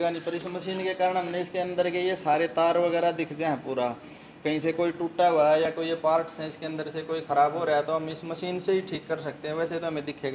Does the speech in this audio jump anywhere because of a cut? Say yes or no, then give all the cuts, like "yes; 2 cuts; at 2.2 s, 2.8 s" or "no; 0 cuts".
no; 0 cuts